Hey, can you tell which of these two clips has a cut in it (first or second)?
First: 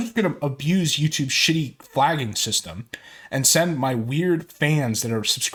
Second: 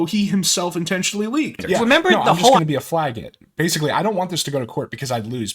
second